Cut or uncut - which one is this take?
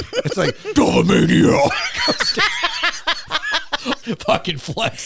cut